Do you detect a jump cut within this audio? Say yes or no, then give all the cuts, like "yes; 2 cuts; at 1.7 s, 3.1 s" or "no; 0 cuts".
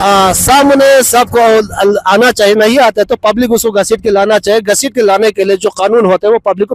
no; 0 cuts